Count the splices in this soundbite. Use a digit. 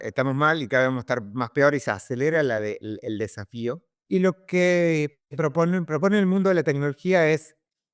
1